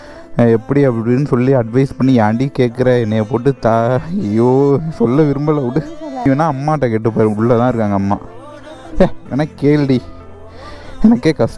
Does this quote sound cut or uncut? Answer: cut